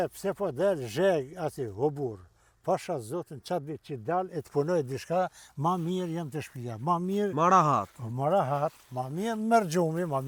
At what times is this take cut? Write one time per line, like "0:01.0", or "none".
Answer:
none